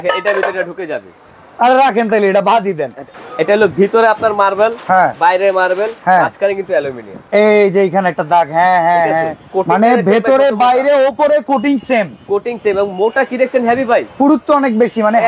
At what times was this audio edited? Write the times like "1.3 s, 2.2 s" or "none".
3.1 s, 9.5 s, 14.1 s